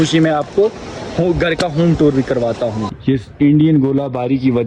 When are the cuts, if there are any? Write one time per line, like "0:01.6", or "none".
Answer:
0:02.9